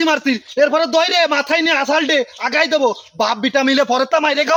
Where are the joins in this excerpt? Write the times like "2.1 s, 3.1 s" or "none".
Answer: none